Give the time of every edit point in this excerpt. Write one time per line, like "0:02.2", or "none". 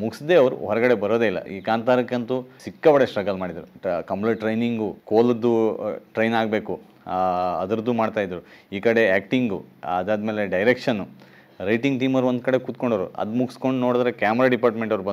0:01.5
0:02.6
0:03.7
0:05.0